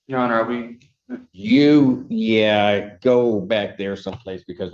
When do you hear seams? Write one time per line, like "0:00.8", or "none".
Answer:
none

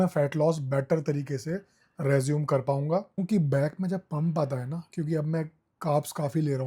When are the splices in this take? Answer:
0:03.2

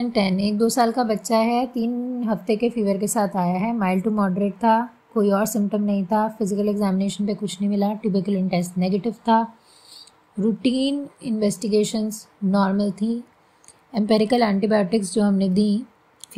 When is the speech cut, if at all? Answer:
none

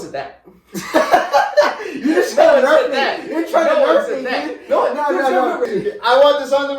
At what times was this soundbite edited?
0:05.7

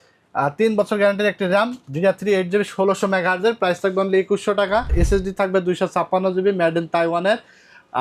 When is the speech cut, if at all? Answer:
0:04.9

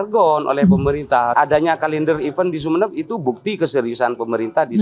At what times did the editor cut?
0:01.3

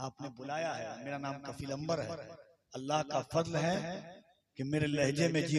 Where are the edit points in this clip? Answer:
none

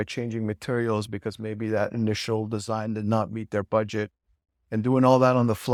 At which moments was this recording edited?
none

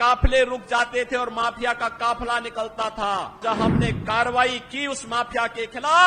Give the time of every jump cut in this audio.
0:03.4

